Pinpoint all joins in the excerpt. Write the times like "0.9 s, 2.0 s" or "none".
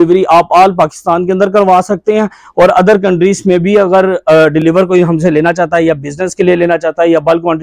none